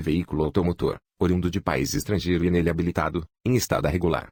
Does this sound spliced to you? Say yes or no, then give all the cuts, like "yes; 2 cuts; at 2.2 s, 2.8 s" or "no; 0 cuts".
no; 0 cuts